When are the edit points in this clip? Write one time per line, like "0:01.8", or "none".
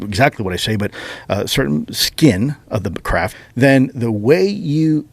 0:03.4